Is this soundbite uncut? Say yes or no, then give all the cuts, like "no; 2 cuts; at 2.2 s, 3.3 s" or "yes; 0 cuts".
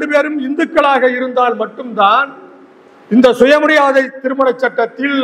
yes; 0 cuts